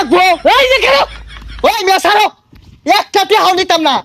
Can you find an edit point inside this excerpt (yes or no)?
yes